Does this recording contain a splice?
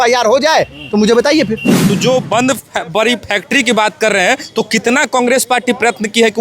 yes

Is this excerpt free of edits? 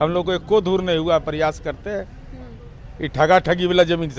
yes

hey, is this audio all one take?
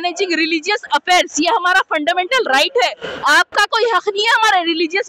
yes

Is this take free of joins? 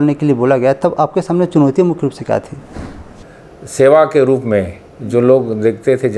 no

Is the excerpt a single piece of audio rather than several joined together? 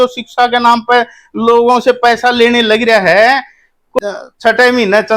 no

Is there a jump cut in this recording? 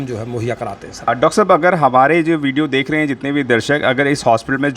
yes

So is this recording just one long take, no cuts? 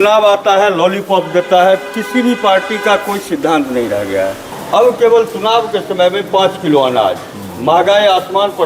no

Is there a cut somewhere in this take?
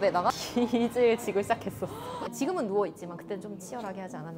no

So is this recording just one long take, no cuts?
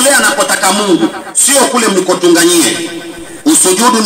yes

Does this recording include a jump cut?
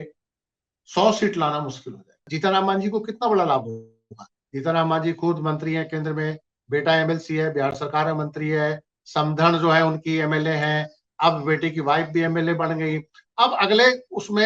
yes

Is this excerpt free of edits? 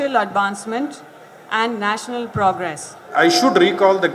no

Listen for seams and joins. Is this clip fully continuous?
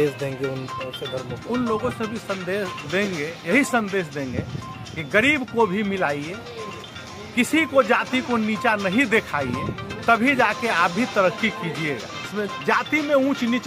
no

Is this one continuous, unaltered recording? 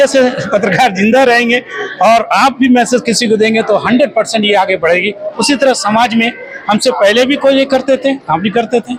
yes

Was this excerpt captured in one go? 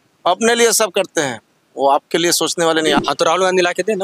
no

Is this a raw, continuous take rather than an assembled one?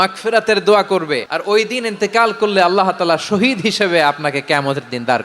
no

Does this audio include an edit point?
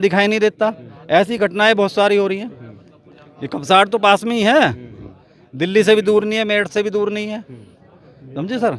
no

